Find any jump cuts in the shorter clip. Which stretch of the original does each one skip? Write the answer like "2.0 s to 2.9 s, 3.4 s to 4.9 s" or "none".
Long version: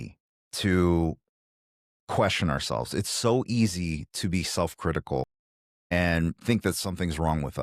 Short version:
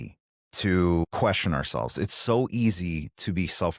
1.0 s to 2.0 s